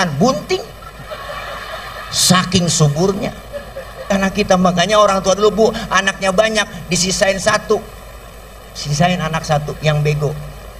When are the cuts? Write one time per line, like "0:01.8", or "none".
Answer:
0:04.1